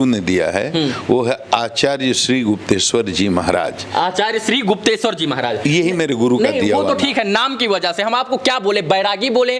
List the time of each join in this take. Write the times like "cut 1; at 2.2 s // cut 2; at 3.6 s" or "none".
none